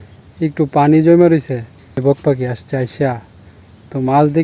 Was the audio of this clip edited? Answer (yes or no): yes